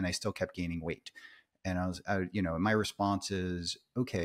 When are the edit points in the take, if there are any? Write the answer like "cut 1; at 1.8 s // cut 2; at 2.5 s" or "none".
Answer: none